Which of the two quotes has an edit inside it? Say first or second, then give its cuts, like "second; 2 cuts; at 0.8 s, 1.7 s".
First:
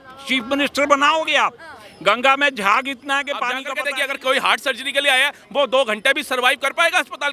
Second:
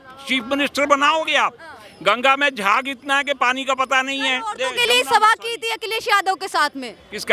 first; 1 cut; at 3.7 s